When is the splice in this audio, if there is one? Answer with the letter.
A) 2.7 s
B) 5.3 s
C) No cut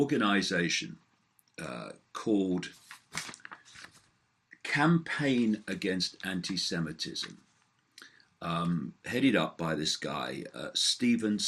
B